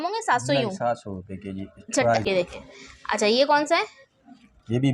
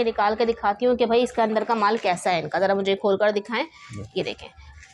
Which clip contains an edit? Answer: first; 1 cut; at 2.2 s

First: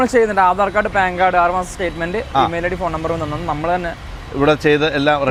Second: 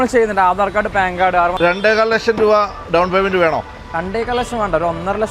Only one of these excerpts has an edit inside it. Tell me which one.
second; 1 cut; at 1.5 s

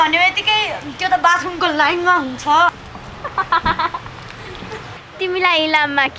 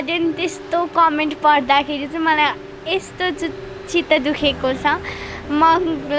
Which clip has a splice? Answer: first; 2 cuts; at 2.8 s, 4.9 s

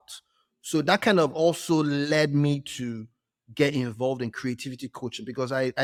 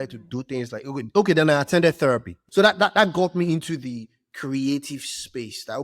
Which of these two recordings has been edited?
second; 1 cut; at 2.4 s

